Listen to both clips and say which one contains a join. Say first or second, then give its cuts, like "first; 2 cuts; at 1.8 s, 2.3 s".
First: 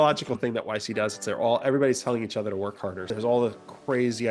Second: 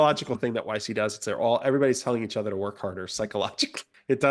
first; 1 cut; at 3.0 s